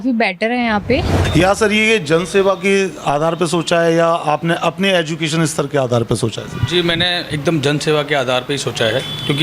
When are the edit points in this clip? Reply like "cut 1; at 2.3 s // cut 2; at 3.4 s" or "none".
cut 1; at 1.2 s